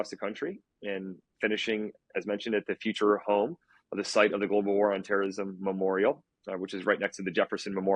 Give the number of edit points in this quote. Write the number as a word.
zero